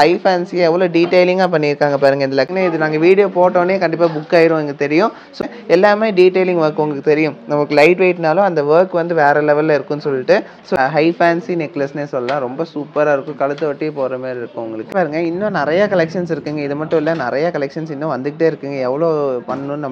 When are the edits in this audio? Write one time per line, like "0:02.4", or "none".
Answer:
0:02.5
0:05.3
0:10.8
0:14.9